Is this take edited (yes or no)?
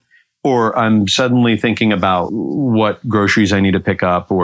yes